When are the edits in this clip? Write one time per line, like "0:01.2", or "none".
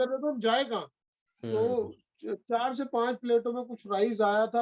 0:01.0